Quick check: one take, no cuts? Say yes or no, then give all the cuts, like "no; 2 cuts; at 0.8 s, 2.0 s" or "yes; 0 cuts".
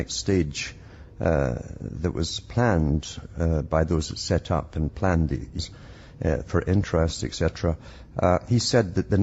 yes; 0 cuts